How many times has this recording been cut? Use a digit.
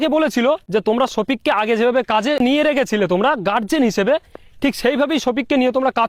0